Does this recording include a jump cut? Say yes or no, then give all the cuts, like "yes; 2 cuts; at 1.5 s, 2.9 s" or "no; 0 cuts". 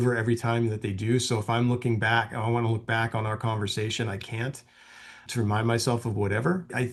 no; 0 cuts